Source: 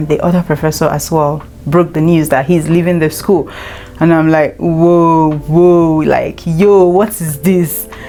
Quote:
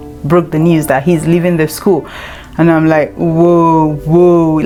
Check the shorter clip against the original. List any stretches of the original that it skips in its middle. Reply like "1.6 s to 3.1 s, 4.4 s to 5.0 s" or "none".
none